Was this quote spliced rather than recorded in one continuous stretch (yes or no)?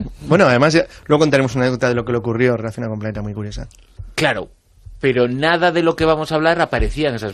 no